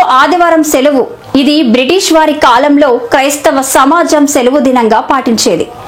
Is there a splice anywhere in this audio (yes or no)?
no